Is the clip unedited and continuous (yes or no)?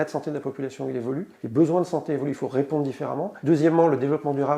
no